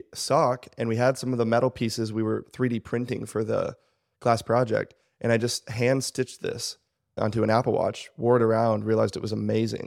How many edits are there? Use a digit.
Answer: 1